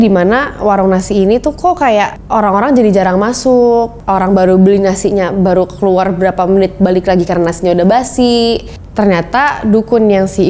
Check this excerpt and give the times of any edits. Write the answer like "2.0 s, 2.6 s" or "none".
none